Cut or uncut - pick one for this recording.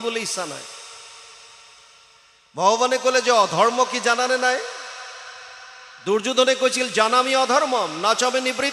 uncut